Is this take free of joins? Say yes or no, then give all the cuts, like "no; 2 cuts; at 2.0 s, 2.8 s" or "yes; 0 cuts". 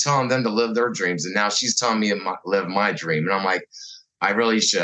yes; 0 cuts